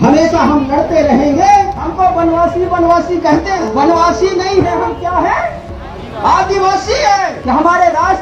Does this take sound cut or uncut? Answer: cut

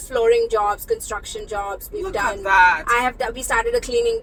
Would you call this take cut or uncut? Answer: uncut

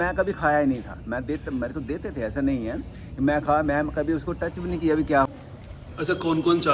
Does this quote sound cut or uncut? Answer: cut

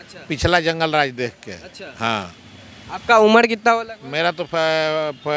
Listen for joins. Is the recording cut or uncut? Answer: uncut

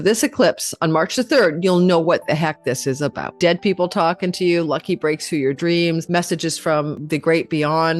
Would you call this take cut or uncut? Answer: cut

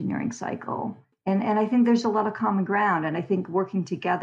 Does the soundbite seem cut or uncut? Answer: uncut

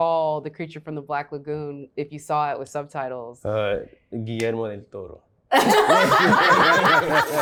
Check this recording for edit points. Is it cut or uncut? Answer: uncut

